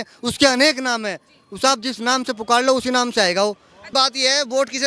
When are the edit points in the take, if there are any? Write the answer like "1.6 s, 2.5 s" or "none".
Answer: 3.9 s